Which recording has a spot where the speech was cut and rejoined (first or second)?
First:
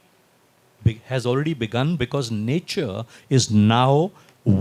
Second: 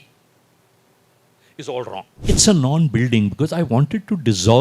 second